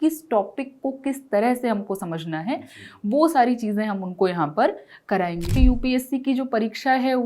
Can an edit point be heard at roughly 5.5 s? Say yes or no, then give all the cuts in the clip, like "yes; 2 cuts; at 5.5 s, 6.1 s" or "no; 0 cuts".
yes; 1 cut; at 5.5 s